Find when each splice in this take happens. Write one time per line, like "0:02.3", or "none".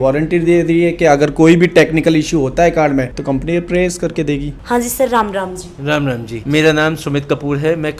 none